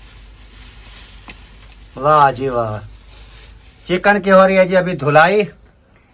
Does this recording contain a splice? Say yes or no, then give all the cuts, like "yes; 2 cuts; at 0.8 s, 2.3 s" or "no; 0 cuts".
no; 0 cuts